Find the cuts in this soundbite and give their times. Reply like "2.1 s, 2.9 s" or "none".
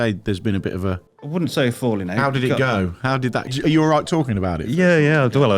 1.1 s, 3.5 s